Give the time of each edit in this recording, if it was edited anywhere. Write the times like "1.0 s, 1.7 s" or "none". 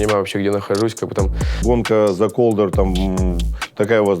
1.6 s